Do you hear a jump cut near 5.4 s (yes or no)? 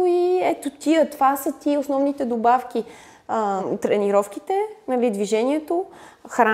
no